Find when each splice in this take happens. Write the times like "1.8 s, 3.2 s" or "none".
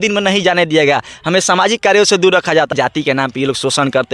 2.7 s